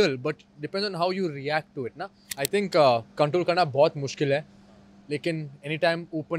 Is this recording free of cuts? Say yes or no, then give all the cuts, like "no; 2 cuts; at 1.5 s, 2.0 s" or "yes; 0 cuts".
no; 1 cut; at 2.3 s